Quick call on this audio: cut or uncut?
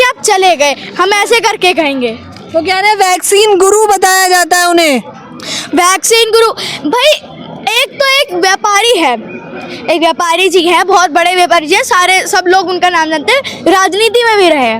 uncut